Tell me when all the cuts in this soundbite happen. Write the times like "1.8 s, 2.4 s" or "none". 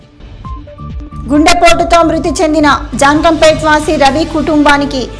1.0 s